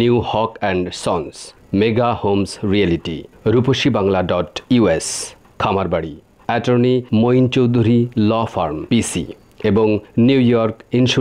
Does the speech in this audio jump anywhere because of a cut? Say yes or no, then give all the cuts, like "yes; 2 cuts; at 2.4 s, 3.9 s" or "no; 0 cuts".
no; 0 cuts